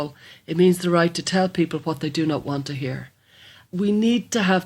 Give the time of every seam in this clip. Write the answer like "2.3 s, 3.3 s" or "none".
3.7 s